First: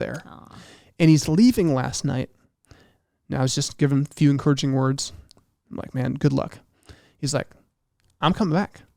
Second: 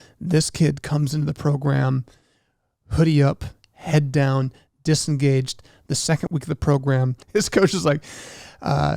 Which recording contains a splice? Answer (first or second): second